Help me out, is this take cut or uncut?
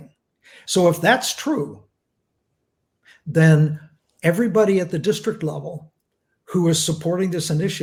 uncut